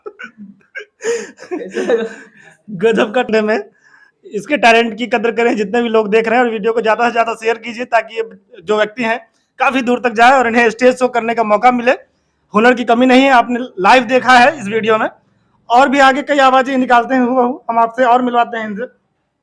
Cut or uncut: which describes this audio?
uncut